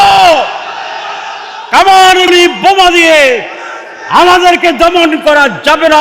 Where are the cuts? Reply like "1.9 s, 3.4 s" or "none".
2.3 s